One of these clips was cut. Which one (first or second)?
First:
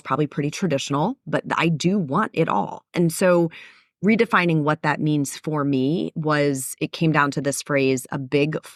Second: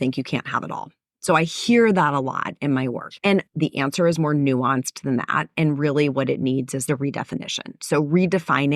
second